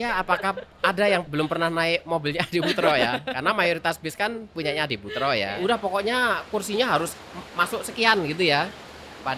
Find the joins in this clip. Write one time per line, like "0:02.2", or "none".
0:05.5